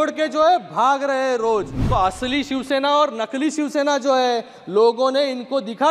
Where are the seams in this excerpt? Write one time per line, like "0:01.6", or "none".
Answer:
0:01.8

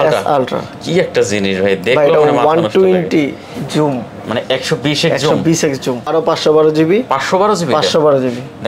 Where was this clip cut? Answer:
0:06.1

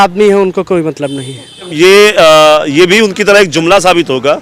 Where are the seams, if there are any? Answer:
0:01.7

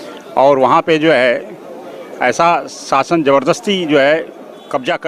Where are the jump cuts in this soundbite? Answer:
none

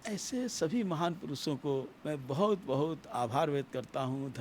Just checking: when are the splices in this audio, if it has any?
0:01.9

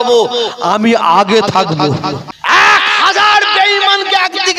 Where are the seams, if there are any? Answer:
0:02.3

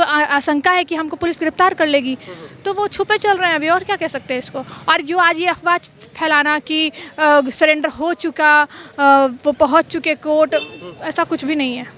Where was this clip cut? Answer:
none

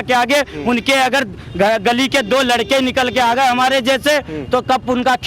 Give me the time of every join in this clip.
none

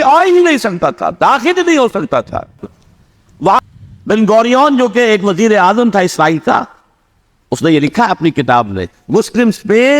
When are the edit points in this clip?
0:03.6

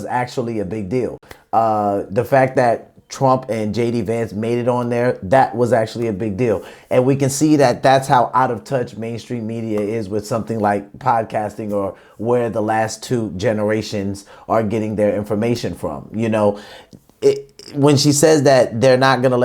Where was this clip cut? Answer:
none

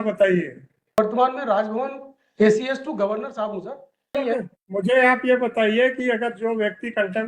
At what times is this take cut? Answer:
0:01.0
0:04.2

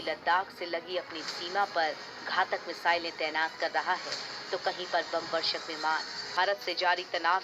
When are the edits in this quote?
0:06.3

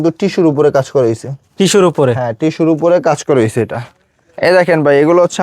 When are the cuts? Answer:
0:04.3

